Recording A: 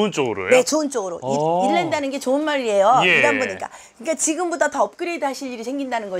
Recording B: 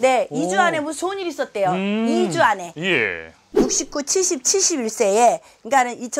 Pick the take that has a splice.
B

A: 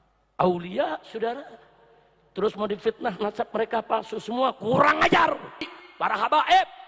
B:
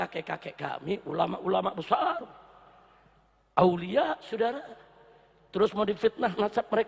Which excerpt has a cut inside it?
A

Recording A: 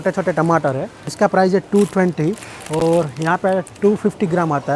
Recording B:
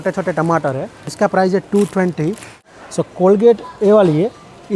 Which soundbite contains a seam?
B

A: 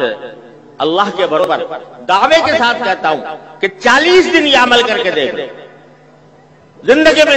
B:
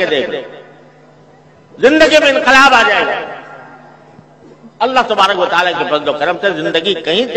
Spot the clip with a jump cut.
A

